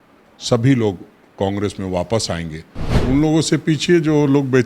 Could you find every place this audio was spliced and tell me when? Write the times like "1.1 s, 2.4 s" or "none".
3.0 s